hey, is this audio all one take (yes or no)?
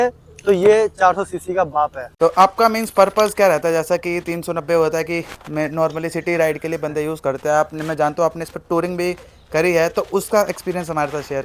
yes